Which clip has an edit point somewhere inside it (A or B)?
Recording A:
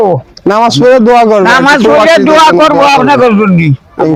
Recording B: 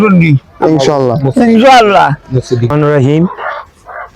B